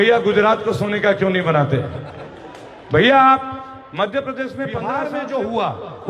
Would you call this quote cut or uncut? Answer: cut